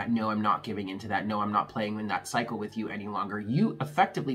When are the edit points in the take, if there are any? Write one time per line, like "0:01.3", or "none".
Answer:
none